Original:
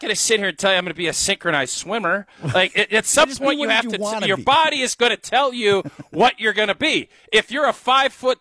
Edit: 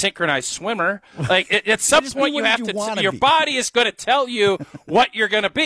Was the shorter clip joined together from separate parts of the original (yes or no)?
no